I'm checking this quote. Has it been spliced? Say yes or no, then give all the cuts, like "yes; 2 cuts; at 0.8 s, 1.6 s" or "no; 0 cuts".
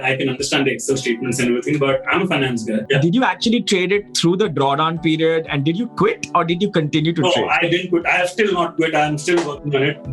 yes; 1 cut; at 2.8 s